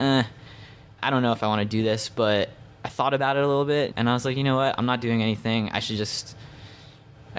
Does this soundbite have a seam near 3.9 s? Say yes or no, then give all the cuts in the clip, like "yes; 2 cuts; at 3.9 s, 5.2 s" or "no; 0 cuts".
yes; 2 cuts; at 1.0 s, 3.9 s